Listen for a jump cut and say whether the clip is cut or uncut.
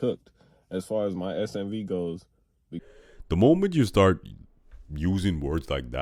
cut